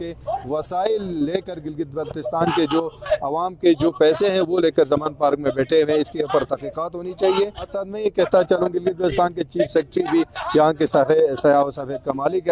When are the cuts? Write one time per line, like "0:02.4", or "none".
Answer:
0:07.7